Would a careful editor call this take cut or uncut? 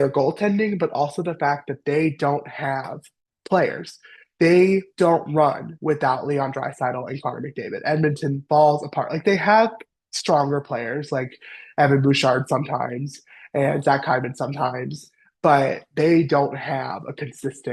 uncut